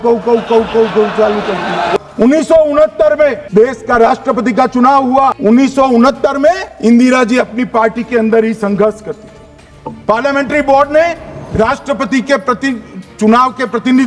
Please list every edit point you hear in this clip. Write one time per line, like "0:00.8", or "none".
0:02.0
0:03.5
0:05.4
0:06.7